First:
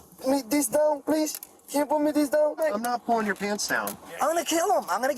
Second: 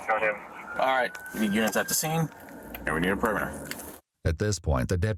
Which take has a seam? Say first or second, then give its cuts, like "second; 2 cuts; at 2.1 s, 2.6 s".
first; 2 cuts; at 2.6 s, 4.0 s